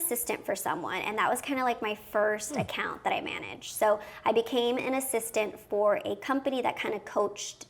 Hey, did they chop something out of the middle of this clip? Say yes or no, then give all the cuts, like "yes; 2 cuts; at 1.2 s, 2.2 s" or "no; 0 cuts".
no; 0 cuts